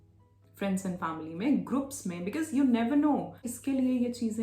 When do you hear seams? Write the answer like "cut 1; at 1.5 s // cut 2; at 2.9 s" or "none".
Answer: cut 1; at 3.5 s